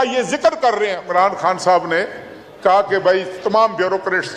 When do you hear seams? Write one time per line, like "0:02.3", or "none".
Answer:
0:01.1